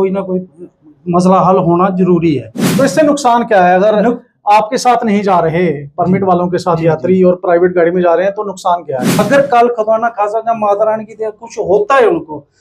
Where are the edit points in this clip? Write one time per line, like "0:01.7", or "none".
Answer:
0:02.6
0:09.1